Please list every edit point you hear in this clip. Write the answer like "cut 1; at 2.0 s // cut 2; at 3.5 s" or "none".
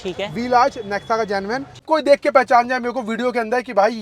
cut 1; at 1.8 s